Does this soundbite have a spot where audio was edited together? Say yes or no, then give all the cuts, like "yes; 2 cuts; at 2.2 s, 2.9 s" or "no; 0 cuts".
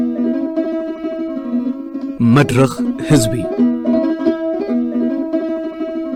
no; 0 cuts